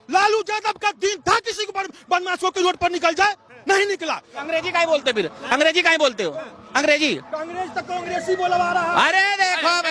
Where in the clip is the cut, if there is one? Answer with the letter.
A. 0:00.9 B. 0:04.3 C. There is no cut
B